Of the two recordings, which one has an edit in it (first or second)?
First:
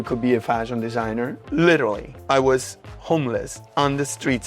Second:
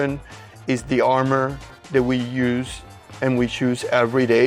first